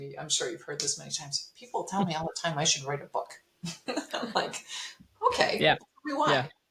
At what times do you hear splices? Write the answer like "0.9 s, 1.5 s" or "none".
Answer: none